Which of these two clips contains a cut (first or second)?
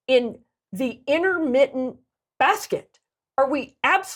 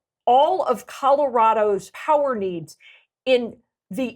second